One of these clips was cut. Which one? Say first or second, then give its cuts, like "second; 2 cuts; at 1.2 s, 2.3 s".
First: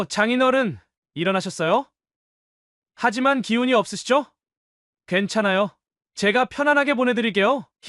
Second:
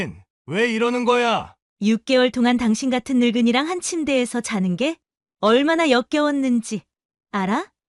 second; 1 cut; at 1.6 s